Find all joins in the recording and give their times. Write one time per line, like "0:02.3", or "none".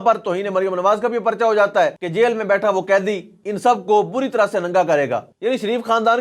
0:02.0
0:04.8